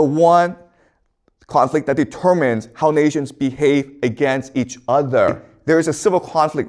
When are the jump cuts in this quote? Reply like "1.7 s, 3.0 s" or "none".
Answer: 5.5 s